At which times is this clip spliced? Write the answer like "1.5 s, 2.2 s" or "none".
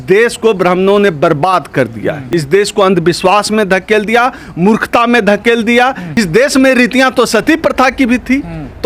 2.2 s, 6.2 s